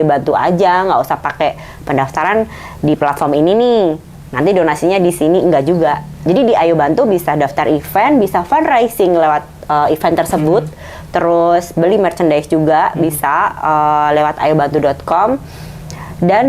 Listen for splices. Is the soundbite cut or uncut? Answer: uncut